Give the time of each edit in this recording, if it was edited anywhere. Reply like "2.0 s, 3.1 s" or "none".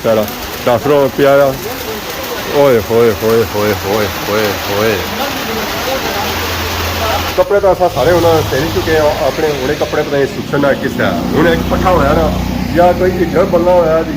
7.3 s